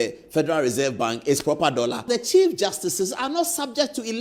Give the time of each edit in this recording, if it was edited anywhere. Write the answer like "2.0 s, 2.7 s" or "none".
2.0 s